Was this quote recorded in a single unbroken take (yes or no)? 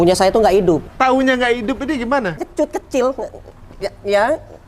no